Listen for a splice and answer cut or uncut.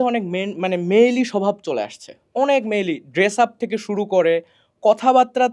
uncut